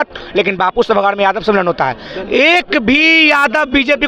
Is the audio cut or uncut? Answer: uncut